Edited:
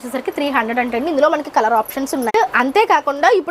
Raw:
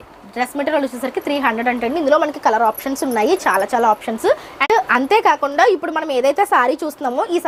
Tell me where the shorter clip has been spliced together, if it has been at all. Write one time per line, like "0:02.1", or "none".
0:02.3